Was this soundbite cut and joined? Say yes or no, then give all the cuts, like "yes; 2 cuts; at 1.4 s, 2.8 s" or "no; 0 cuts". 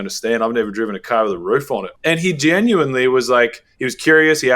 yes; 1 cut; at 1.9 s